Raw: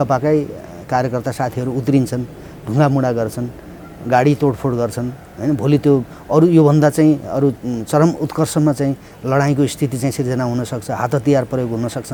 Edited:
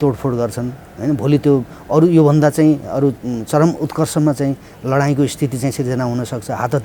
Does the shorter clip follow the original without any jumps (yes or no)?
yes